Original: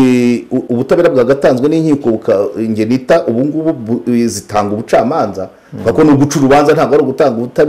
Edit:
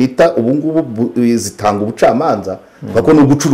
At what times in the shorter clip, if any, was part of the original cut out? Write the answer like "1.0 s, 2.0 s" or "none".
none